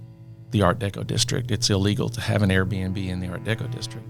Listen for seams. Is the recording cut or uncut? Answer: uncut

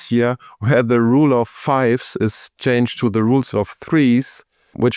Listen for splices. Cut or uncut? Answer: uncut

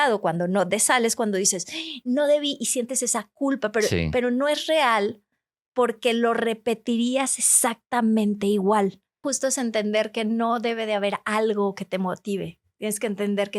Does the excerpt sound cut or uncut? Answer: cut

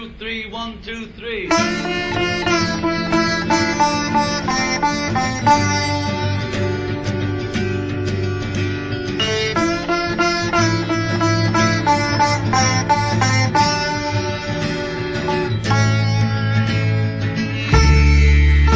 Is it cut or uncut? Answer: uncut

